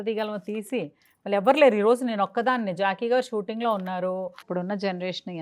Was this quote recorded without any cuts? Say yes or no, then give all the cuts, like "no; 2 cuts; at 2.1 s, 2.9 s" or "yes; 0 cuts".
no; 1 cut; at 4.4 s